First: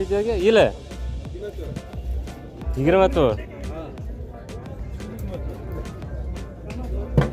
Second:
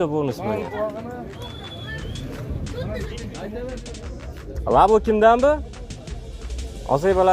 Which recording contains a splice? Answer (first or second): second